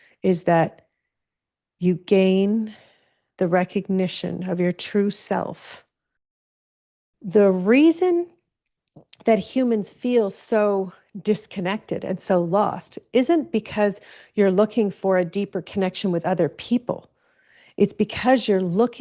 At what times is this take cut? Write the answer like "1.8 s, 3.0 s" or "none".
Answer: 6.7 s